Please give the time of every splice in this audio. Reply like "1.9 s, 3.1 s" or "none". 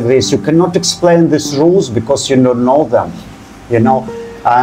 none